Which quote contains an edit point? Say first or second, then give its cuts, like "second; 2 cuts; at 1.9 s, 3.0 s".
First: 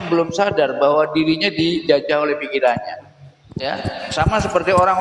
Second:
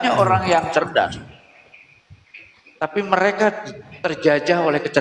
first; 1 cut; at 3.5 s